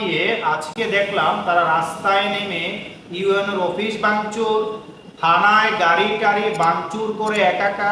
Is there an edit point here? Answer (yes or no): no